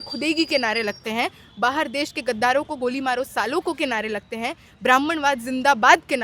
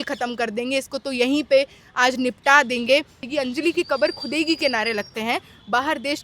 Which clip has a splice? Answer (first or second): second